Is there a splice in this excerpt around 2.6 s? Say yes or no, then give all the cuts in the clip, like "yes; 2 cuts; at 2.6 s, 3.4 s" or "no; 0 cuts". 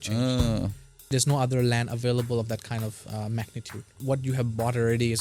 no; 2 cuts; at 1.0 s, 4.0 s